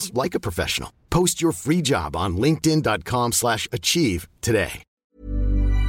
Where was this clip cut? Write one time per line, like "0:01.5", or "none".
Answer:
0:04.9